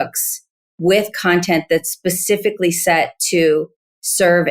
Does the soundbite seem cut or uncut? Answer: uncut